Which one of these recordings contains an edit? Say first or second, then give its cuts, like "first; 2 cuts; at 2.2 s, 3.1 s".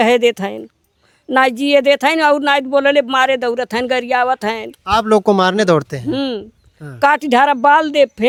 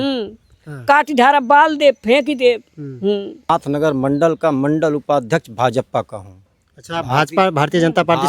second; 1 cut; at 3.5 s